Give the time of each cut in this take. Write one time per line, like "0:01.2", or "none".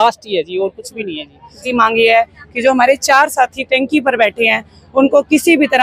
0:01.7